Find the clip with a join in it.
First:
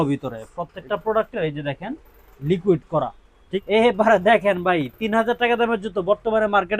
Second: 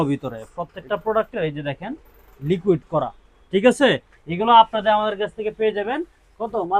first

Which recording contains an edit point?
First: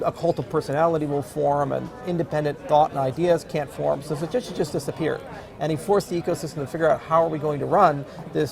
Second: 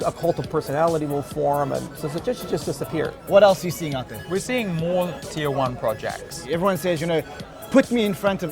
second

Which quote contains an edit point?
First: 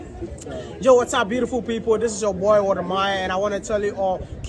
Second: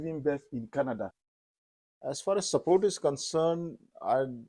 second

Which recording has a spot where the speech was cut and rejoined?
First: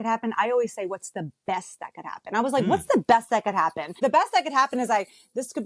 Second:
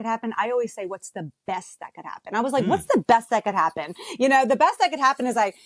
first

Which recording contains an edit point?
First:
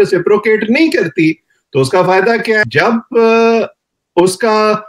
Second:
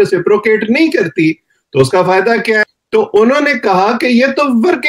second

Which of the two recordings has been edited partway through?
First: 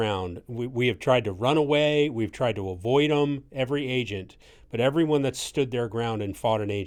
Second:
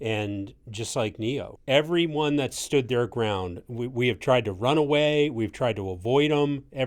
second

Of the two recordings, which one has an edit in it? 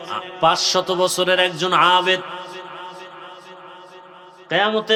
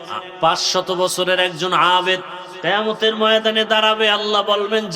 second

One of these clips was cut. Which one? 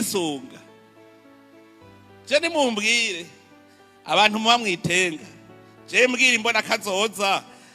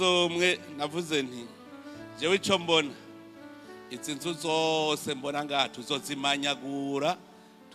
first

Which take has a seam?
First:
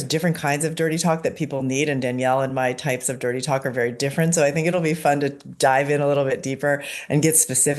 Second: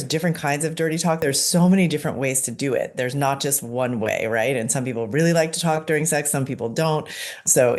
second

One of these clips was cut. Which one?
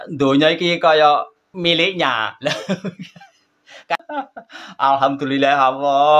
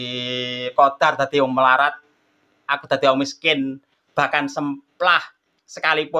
first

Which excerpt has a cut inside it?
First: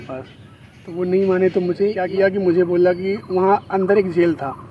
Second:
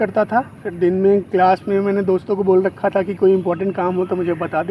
first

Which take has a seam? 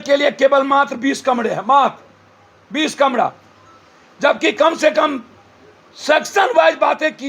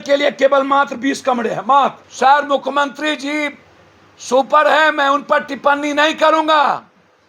second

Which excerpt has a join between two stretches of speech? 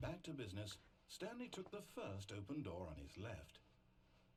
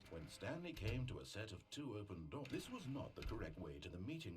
second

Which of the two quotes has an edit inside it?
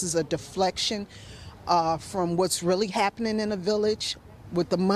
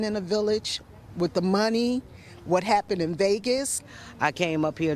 second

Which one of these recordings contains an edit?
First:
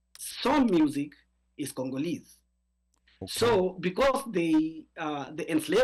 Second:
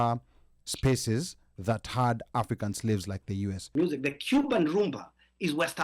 second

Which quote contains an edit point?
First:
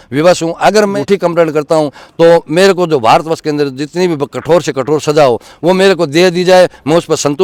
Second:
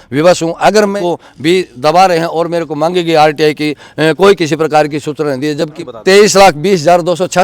second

